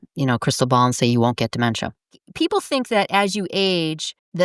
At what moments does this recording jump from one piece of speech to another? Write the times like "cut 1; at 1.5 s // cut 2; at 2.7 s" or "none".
cut 1; at 2.2 s